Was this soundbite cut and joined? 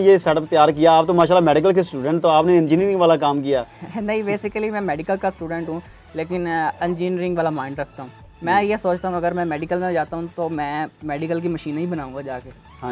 no; 0 cuts

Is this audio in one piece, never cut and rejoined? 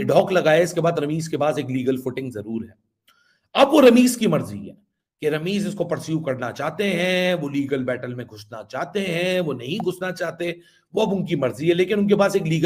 yes; 0 cuts

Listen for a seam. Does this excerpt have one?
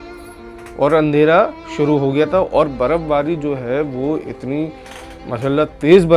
no; 0 cuts

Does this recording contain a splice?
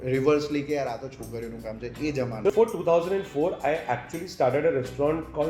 yes; 1 cut; at 2.5 s

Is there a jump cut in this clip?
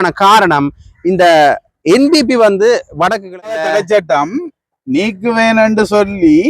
yes; 1 cut; at 3.6 s

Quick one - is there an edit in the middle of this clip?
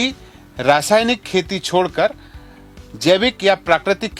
no; 0 cuts

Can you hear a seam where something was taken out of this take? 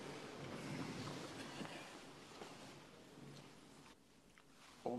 yes; 1 cut; at 3.9 s

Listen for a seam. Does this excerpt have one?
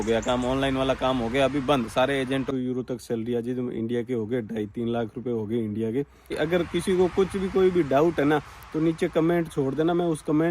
yes; 2 cuts; at 2.5 s, 6.4 s

